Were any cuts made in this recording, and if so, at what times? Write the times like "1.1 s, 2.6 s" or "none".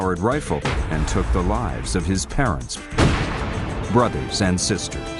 3.4 s